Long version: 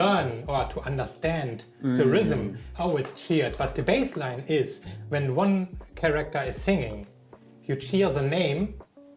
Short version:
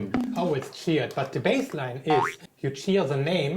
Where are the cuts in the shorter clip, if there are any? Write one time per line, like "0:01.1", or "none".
0:02.4